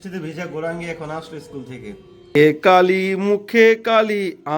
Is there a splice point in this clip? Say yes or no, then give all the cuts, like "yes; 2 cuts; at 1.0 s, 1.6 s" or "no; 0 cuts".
yes; 1 cut; at 2.3 s